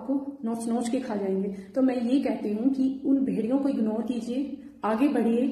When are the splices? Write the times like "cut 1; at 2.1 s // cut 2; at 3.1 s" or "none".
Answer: none